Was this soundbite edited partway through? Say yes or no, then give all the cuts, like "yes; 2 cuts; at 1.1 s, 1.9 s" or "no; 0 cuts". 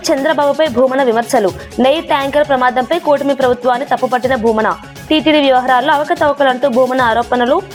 no; 0 cuts